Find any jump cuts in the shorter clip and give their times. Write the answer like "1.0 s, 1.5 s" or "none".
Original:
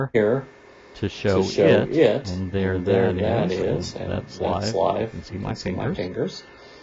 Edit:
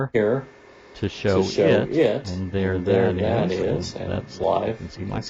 4.4 s

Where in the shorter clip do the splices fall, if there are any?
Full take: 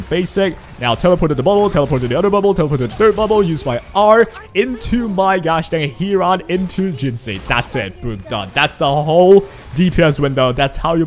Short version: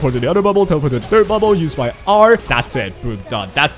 2.5 s

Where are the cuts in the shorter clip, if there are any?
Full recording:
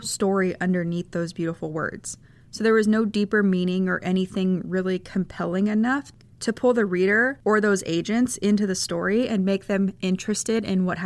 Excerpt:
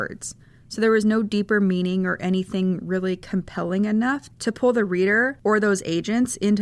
4.3 s

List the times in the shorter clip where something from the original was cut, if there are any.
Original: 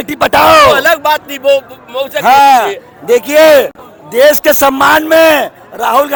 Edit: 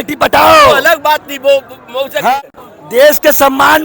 2.4 s

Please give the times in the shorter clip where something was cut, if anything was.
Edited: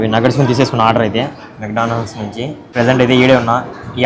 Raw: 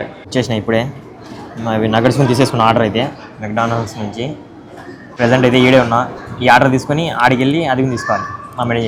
2.6 s

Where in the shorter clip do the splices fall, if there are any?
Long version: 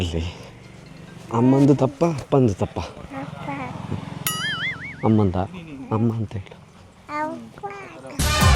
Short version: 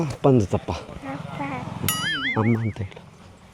2.1 s

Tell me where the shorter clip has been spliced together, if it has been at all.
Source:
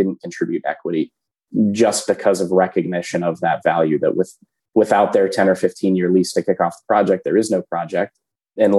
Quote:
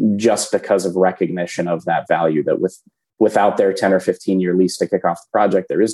none

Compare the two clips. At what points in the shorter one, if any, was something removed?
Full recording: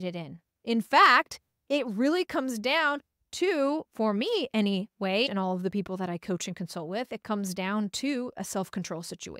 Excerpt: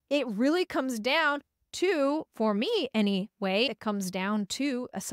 3.7 s

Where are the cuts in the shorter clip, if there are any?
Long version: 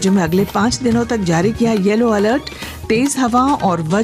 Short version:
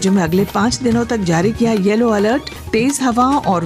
2.5 s

